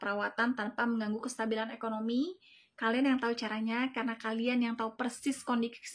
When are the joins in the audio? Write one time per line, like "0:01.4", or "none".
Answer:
none